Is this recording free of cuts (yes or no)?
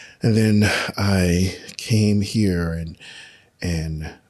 yes